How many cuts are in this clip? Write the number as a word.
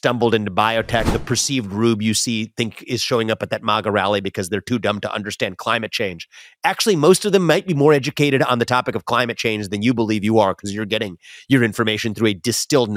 one